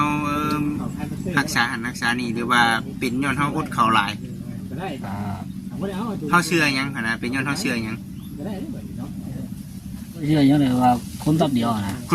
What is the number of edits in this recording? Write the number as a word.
one